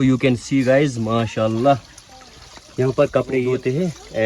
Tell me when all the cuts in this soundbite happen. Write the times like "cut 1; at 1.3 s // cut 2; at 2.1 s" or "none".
none

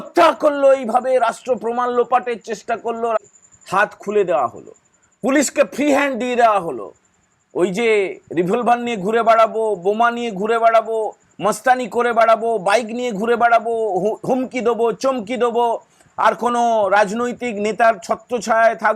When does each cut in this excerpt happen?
cut 1; at 3.2 s

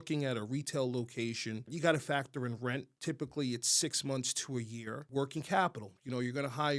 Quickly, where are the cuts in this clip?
cut 1; at 1.7 s // cut 2; at 2.9 s // cut 3; at 5.0 s

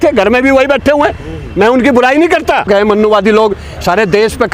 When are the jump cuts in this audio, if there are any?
cut 1; at 2.7 s

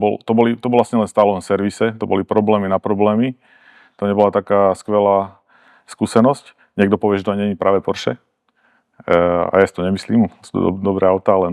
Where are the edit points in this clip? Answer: none

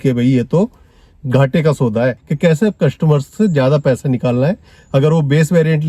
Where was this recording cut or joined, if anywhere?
cut 1; at 2.2 s

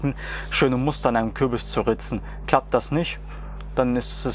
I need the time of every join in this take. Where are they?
none

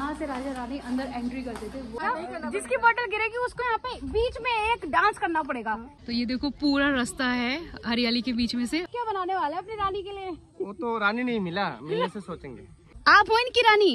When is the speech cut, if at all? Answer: cut 1; at 2.0 s // cut 2; at 5.9 s // cut 3; at 8.9 s // cut 4; at 12.9 s

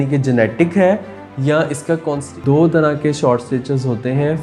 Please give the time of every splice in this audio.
cut 1; at 2.2 s

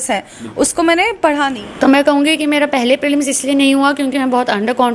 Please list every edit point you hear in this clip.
cut 1; at 1.6 s

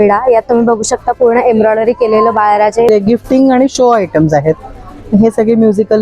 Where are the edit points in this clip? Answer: cut 1; at 2.9 s

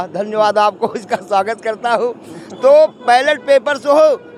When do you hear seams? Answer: none

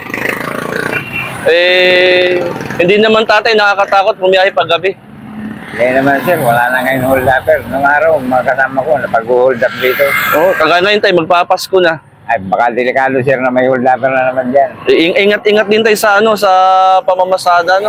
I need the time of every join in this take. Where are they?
none

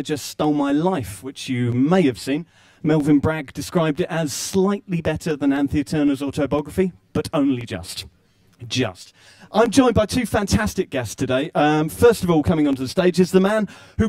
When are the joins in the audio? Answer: none

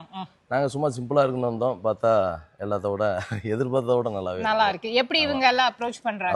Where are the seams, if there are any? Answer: none

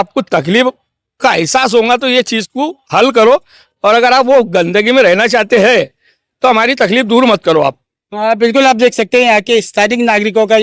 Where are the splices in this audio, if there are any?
none

